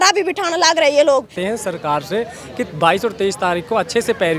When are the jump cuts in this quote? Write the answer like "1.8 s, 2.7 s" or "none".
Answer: 1.4 s